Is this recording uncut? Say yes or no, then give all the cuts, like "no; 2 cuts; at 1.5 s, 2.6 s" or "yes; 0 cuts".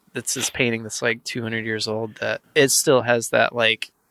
no; 1 cut; at 2.4 s